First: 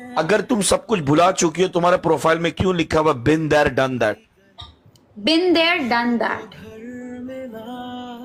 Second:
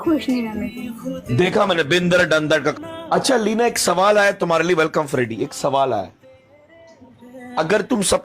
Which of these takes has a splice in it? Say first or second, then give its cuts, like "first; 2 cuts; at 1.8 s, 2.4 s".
second; 1 cut; at 2.8 s